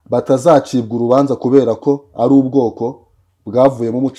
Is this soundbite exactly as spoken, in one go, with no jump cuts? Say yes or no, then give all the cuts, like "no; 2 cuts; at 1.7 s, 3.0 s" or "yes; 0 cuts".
yes; 0 cuts